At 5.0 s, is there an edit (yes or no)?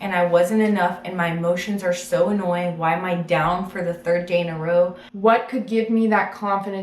yes